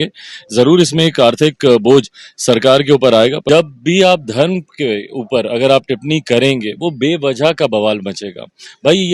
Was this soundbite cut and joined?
yes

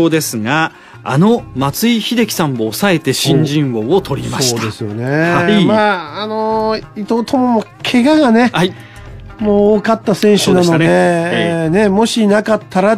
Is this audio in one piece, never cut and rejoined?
yes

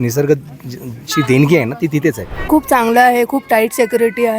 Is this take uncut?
no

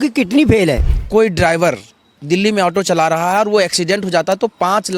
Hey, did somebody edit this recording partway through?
yes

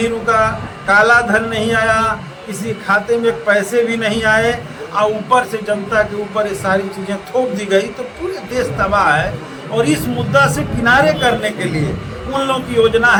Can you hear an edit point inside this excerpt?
no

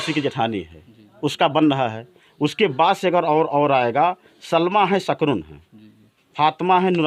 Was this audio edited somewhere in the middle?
no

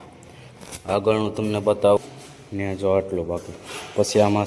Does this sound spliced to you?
yes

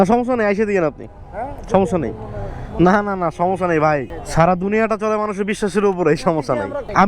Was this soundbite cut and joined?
no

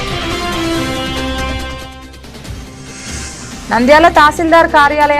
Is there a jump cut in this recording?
yes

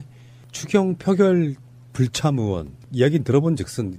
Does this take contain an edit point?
no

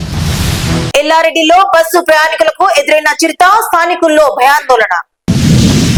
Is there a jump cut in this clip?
no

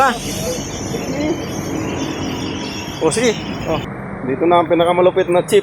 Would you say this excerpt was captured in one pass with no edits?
no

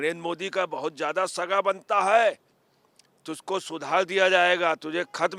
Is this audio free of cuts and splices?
yes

